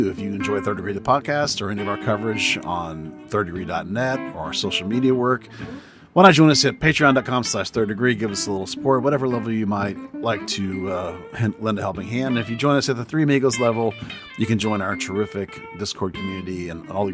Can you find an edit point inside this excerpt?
no; 0 cuts

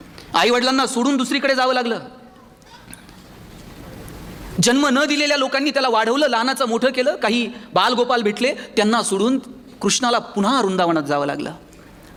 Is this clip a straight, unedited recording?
yes; 0 cuts

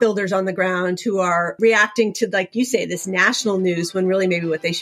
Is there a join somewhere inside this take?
yes; 2 cuts; at 1.5 s, 2.5 s

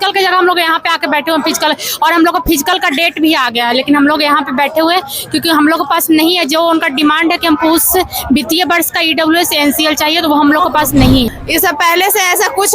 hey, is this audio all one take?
no; 1 cut; at 11.4 s

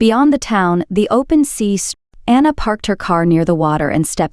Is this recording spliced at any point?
yes; 1 cut; at 1.9 s

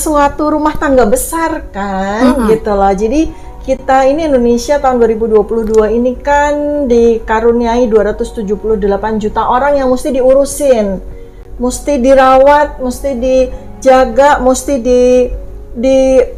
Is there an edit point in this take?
no; 0 cuts

